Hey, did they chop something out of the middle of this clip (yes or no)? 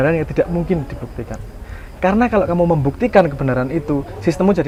no